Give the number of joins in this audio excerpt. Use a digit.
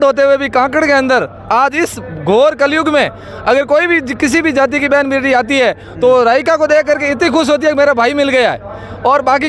0